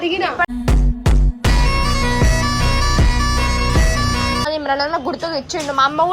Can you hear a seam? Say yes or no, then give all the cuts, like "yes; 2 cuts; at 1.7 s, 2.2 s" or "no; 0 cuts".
yes; 1 cut; at 4.5 s